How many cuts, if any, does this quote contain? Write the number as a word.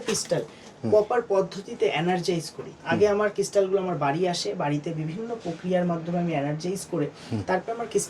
zero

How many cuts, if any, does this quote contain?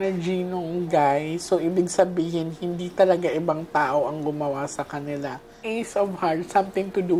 one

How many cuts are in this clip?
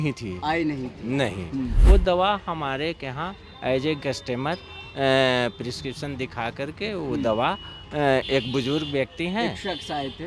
one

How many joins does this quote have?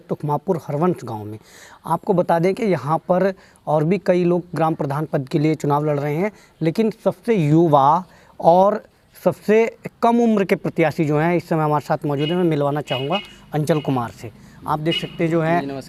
zero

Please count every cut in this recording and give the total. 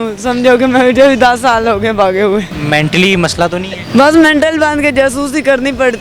two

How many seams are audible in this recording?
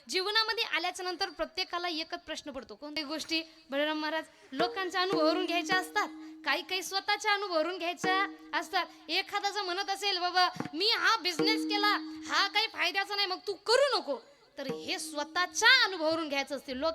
one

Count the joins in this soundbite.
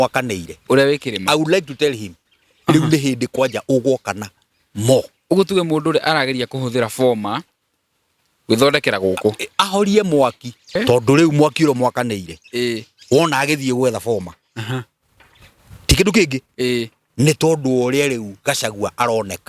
one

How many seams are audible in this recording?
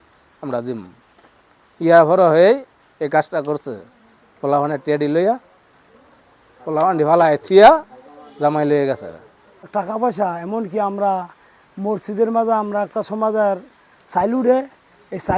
one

